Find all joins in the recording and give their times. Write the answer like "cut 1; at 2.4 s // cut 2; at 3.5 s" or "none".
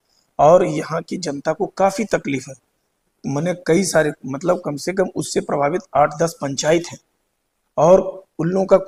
none